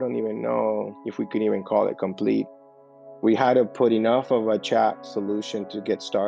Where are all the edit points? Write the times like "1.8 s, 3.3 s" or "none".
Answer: 2.6 s